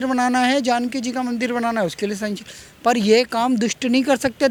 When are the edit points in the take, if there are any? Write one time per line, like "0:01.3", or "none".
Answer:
none